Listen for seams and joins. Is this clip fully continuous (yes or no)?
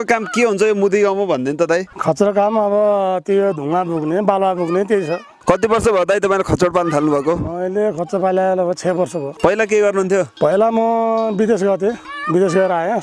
no